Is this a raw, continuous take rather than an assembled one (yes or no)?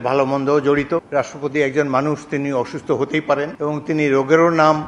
no